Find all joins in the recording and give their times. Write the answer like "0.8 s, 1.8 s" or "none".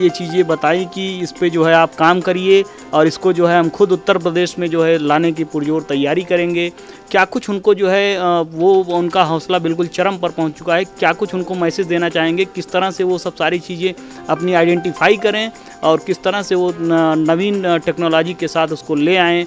none